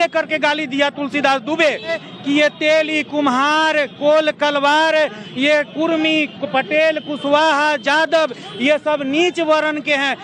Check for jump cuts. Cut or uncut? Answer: uncut